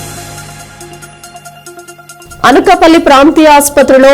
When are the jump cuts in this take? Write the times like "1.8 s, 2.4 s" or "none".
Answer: 2.2 s